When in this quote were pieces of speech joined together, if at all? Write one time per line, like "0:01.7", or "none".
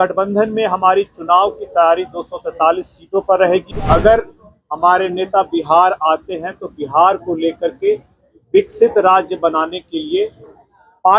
0:03.7